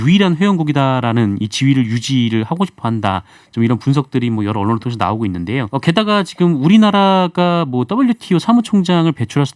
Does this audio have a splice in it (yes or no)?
yes